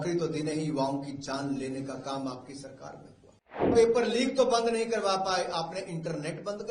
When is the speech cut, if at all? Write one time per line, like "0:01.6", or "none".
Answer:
0:03.7